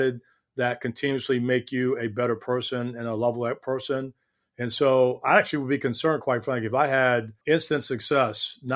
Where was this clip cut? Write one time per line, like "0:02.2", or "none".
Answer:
0:07.3